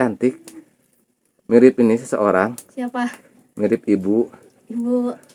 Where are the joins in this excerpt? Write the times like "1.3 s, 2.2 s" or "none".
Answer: none